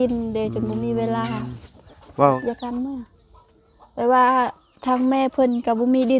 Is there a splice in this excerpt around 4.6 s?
no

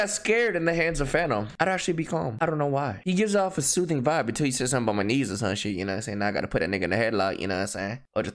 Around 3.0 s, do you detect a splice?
no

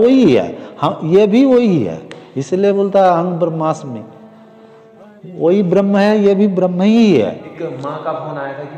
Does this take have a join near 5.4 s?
no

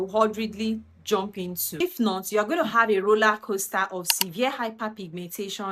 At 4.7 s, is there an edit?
no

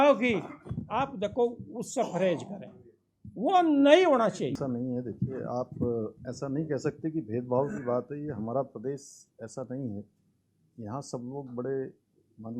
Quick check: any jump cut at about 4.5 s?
yes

